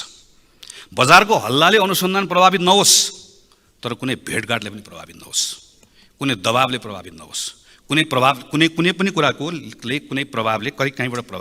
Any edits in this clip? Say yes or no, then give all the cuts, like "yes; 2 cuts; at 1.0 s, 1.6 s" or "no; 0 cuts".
no; 0 cuts